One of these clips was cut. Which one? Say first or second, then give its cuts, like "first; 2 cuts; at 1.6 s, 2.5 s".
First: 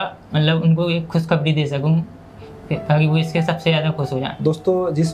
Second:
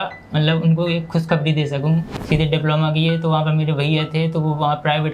second; 1 cut; at 2.2 s